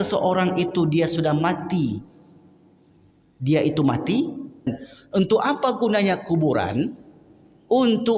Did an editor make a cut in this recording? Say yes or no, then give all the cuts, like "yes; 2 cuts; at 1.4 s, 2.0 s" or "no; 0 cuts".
yes; 1 cut; at 4.7 s